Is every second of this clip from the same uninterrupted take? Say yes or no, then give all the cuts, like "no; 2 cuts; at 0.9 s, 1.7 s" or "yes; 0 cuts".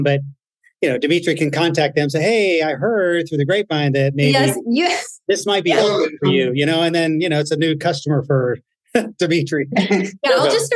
yes; 0 cuts